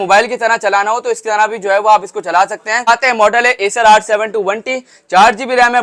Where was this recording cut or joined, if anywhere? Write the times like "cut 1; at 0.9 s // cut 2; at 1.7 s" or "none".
none